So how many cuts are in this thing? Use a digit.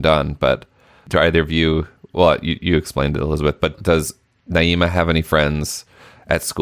2